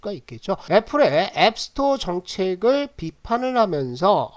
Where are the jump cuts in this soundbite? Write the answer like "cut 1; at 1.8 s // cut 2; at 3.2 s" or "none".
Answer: none